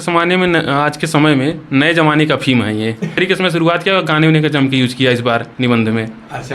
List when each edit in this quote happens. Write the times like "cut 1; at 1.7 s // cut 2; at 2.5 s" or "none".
cut 1; at 3.2 s